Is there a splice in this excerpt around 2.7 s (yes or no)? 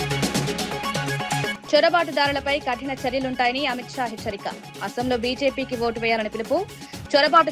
no